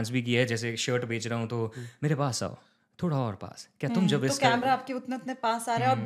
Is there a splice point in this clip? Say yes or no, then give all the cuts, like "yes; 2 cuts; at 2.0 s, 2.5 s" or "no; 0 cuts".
no; 0 cuts